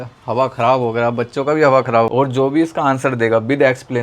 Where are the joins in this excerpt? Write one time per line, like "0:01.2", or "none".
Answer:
0:02.1